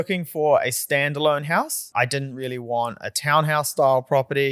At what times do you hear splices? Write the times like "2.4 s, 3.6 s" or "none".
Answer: 1.8 s

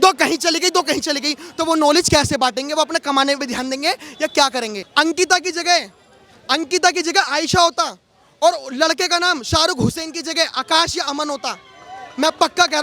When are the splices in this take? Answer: 4.8 s

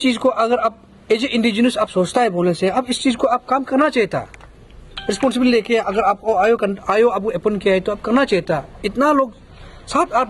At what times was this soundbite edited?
none

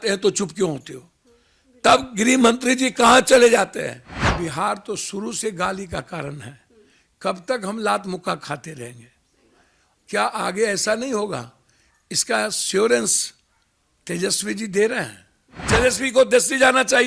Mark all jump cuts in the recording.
4.2 s, 15.6 s

